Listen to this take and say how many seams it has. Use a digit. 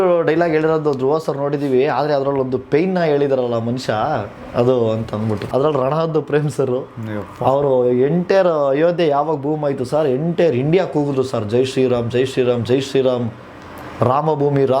1